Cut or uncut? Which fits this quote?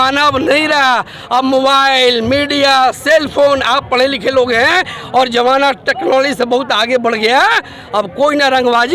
uncut